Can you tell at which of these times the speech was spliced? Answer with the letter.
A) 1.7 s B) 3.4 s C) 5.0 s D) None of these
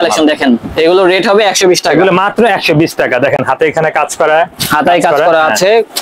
D